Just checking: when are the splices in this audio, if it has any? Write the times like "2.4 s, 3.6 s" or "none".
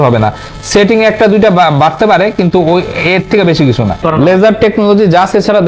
4.0 s